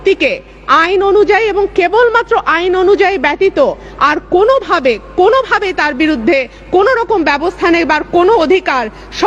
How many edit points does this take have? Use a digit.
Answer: 1